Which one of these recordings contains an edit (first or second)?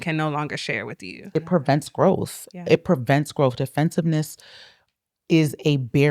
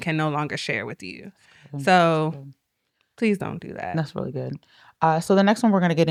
first